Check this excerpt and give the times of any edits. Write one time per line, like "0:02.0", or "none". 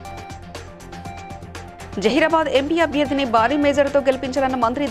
0:01.7